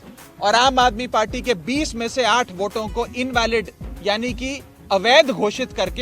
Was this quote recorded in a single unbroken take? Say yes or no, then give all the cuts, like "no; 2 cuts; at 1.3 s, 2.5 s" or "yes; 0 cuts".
yes; 0 cuts